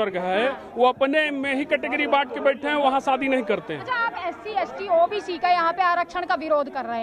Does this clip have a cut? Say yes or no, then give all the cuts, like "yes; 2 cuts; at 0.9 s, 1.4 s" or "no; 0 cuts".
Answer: no; 0 cuts